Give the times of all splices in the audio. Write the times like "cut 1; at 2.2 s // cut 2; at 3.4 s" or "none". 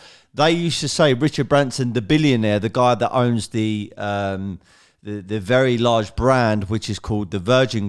none